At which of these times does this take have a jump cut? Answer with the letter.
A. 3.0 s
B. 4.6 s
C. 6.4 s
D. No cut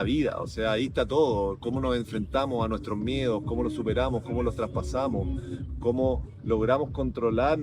D